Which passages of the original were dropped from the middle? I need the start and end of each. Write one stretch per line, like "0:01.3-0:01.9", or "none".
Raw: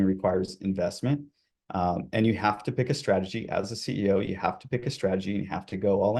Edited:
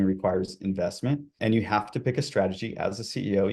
0:01.3-0:02.1